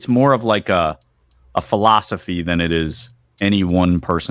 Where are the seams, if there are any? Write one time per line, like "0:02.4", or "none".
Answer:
none